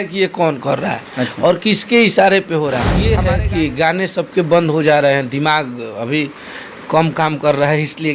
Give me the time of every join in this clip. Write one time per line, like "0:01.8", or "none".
0:03.0